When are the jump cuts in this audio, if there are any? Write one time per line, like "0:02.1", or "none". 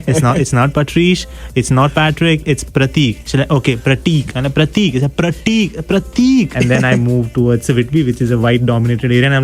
0:06.6